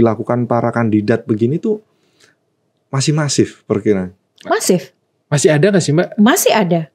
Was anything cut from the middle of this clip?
no; 0 cuts

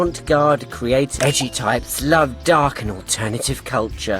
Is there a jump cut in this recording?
yes; 1 cut; at 1.1 s

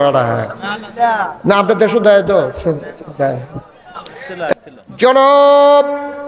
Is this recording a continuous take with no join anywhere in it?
no; 1 cut; at 4.5 s

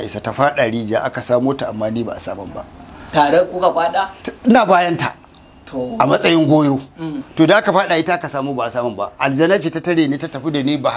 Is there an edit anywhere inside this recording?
no; 0 cuts

